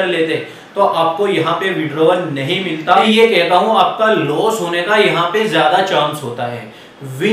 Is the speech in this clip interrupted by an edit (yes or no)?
yes